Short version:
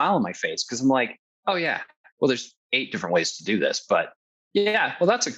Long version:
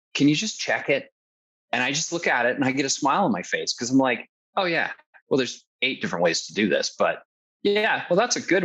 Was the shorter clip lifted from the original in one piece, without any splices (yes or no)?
yes